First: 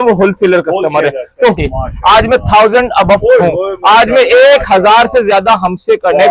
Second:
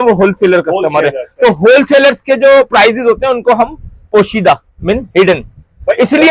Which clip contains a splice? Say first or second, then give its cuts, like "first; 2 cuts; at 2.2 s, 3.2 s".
first; 1 cut; at 1.6 s